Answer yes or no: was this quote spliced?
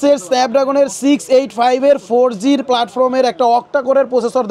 no